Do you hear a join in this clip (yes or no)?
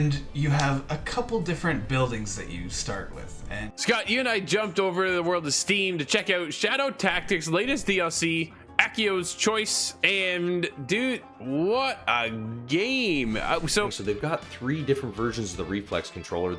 yes